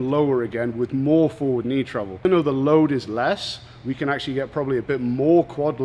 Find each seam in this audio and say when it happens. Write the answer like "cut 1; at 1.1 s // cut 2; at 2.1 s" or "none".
cut 1; at 2.2 s

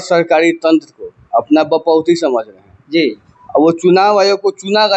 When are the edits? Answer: none

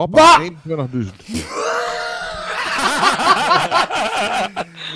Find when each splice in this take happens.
none

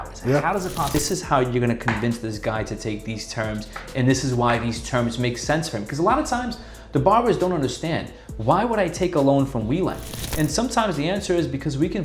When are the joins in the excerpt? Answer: cut 1; at 1.0 s

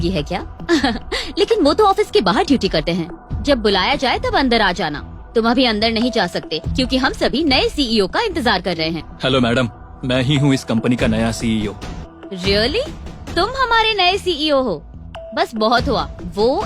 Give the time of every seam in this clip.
cut 1; at 9.1 s // cut 2; at 12.0 s

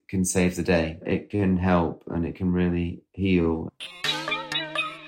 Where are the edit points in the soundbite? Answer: cut 1; at 1.1 s // cut 2; at 3.5 s

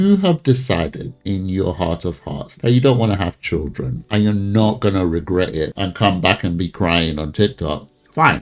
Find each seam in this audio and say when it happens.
cut 1; at 1.1 s // cut 2; at 2.6 s

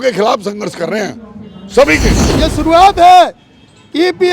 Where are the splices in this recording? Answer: cut 1; at 2.4 s

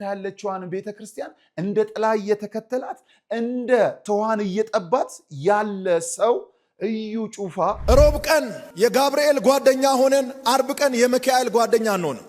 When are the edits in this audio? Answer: cut 1; at 7.8 s

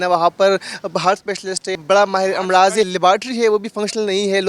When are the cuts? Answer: cut 1; at 1.7 s // cut 2; at 2.9 s

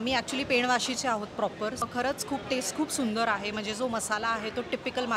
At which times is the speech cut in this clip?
cut 1; at 1.8 s

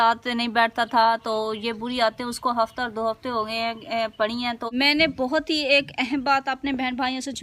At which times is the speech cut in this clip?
cut 1; at 4.6 s

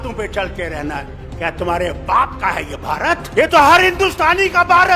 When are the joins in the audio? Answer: cut 1; at 3.3 s

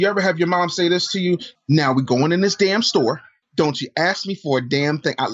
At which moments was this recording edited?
cut 1; at 1.5 s // cut 2; at 3.3 s

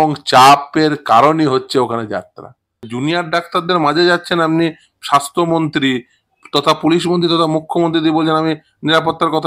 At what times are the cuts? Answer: cut 1; at 2.9 s

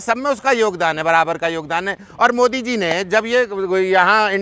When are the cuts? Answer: none

